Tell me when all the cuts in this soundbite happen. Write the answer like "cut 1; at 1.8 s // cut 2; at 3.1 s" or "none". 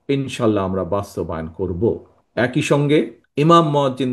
cut 1; at 2.1 s // cut 2; at 3.2 s